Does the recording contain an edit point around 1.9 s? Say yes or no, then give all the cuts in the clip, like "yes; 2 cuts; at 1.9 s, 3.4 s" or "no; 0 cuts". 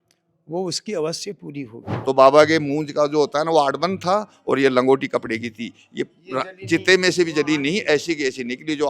yes; 1 cut; at 1.9 s